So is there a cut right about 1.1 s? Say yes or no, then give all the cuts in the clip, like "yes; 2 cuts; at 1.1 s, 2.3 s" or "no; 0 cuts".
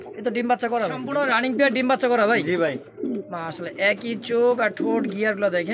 yes; 1 cut; at 1.1 s